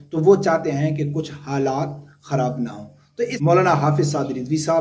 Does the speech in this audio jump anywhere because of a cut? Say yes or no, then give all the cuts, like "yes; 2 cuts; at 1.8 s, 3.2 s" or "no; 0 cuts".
yes; 1 cut; at 3.3 s